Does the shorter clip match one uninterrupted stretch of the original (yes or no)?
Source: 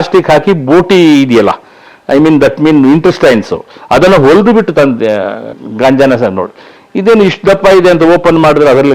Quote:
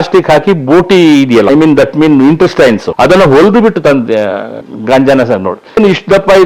no